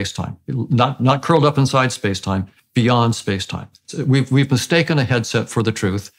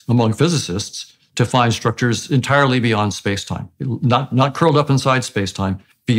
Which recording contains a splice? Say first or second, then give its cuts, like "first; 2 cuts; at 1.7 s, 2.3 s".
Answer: first; 1 cut; at 3.8 s